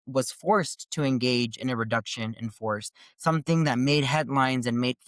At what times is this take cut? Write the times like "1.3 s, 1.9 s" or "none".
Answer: none